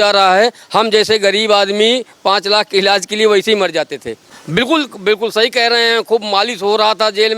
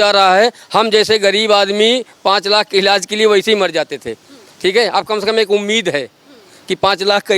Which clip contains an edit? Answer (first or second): first